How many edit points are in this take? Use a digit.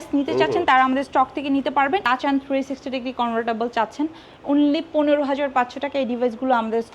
1